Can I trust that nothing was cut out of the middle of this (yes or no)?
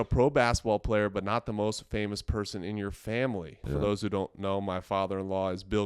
no